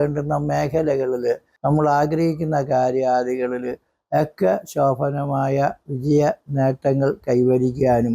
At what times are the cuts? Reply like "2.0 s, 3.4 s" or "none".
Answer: 1.5 s